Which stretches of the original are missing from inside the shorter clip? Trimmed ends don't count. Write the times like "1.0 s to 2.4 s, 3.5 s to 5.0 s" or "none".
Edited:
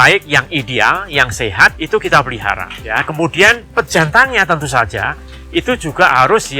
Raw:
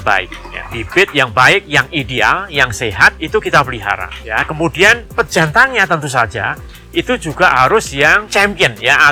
none